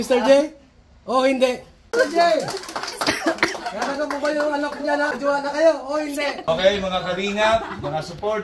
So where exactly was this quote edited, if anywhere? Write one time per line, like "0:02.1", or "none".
0:01.9
0:05.1
0:06.5